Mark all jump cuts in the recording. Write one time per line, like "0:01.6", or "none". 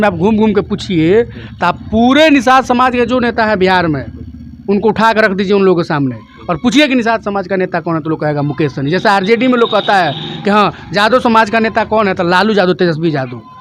none